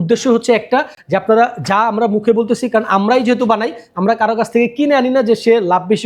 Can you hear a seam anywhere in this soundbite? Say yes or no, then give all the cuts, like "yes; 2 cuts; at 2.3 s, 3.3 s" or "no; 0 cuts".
no; 0 cuts